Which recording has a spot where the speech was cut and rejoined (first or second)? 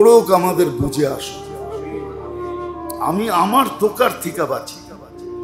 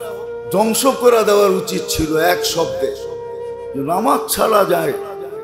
first